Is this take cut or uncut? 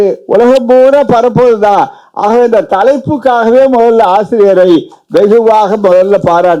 uncut